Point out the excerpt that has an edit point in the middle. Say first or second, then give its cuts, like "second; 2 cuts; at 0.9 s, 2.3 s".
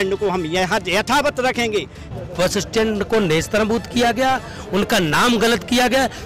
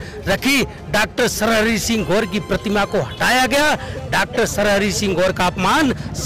first; 1 cut; at 2.1 s